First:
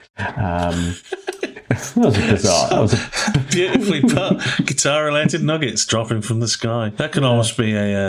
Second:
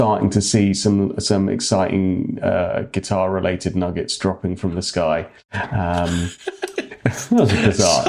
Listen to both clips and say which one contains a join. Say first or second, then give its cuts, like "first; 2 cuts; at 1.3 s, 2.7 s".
first; 1 cut; at 6.9 s